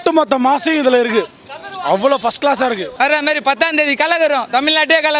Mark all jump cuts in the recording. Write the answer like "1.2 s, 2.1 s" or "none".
2.9 s